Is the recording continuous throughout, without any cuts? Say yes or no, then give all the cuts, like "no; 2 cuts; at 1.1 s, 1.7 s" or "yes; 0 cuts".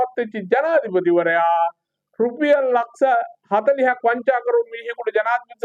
yes; 0 cuts